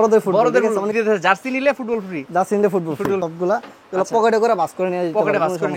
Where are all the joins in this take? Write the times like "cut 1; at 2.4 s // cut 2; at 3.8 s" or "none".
cut 1; at 0.9 s // cut 2; at 3.3 s